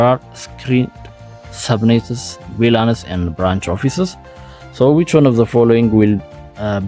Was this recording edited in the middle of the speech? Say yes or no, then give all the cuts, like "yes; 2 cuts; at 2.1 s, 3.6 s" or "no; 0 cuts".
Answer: no; 0 cuts